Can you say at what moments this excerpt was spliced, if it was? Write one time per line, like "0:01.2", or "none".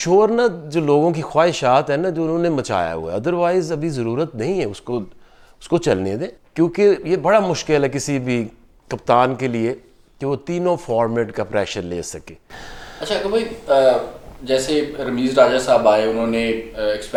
none